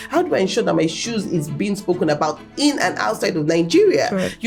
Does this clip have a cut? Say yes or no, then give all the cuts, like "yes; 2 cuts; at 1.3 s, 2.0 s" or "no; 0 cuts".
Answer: no; 0 cuts